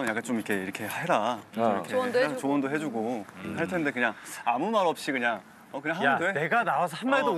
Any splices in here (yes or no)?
no